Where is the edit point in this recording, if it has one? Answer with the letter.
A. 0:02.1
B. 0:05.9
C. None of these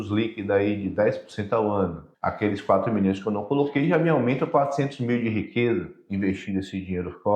A